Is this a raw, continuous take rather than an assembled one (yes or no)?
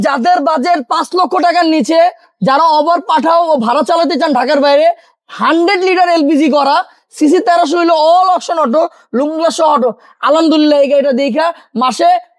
yes